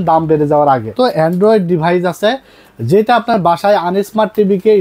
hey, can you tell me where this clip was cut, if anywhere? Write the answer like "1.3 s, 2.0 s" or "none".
0.9 s

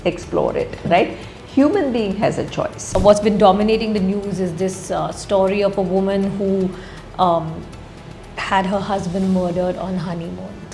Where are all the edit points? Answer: 2.8 s

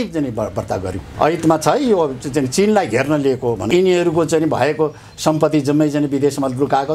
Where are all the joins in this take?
1.0 s, 3.7 s

